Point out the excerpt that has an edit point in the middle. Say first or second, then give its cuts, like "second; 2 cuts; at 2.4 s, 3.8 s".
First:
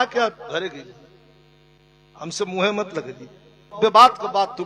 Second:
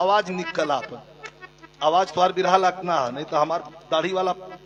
first; 1 cut; at 3.7 s